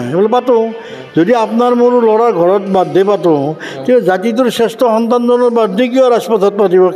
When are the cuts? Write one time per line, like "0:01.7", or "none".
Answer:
none